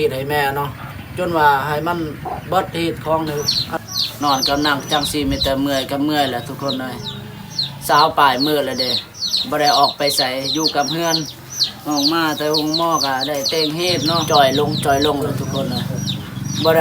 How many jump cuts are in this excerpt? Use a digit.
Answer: 2